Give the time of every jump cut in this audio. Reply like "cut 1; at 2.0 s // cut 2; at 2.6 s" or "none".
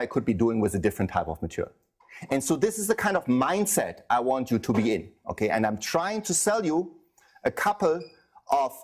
cut 1; at 1.7 s